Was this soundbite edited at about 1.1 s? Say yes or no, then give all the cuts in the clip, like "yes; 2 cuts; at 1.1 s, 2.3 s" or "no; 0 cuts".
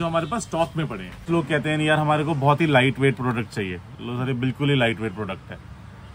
yes; 1 cut; at 1.1 s